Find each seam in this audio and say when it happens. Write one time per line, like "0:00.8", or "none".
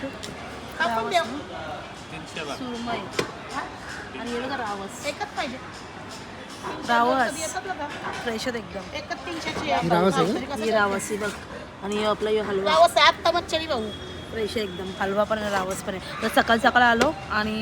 none